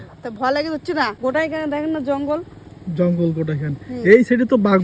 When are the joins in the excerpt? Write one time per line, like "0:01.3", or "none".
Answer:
0:01.1